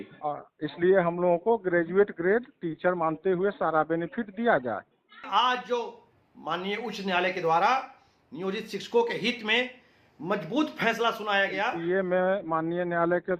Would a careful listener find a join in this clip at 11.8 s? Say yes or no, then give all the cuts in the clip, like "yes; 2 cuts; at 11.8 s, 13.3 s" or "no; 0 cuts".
yes; 2 cuts; at 5.2 s, 11.8 s